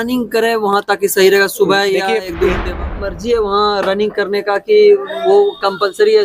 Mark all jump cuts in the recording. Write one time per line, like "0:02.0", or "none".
0:02.7